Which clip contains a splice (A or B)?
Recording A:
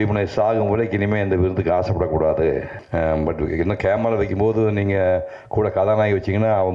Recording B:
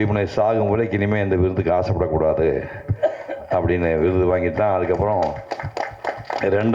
A